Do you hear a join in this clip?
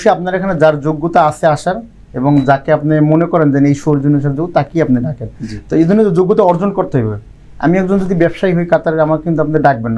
no; 0 cuts

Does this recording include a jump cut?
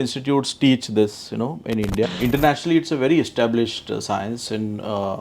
yes; 1 cut; at 2.1 s

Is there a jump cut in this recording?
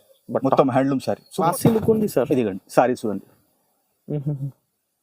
yes; 1 cut; at 1.4 s

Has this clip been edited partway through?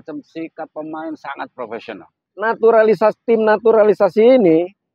yes; 1 cut; at 2.2 s

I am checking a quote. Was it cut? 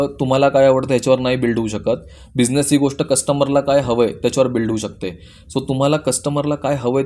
no; 0 cuts

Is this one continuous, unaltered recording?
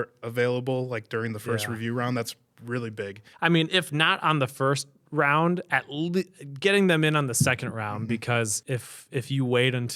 no; 2 cuts; at 3.2 s, 8.6 s

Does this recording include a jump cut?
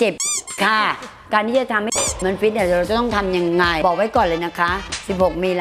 yes; 2 cuts; at 1.1 s, 3.8 s

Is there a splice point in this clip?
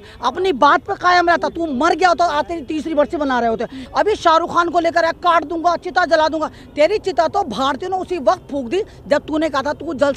yes; 1 cut; at 3.8 s

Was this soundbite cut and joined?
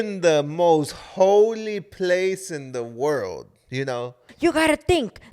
yes; 1 cut; at 4.3 s

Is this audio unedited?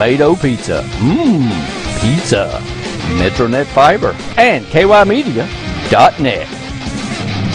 no; 1 cut; at 4.2 s

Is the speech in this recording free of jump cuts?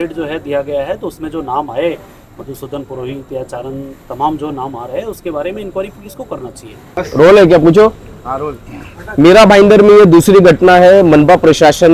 yes; 0 cuts

